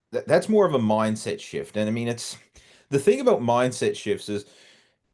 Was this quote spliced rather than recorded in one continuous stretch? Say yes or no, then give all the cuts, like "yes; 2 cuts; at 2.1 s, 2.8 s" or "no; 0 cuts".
no; 0 cuts